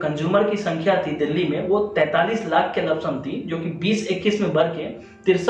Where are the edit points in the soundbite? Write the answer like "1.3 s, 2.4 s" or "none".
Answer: none